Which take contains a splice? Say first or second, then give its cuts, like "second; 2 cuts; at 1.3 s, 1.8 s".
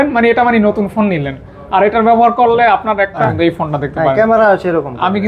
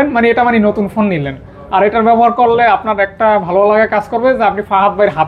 first; 1 cut; at 3.2 s